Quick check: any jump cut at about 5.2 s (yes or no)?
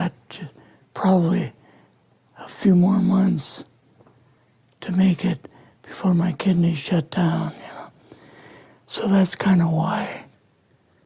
yes